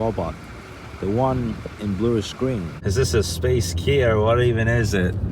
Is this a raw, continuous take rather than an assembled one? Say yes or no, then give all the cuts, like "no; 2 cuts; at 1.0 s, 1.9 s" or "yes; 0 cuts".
no; 1 cut; at 2.7 s